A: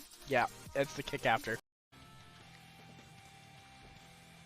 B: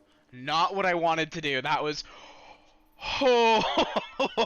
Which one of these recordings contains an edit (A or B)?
A